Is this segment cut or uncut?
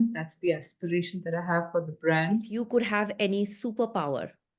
cut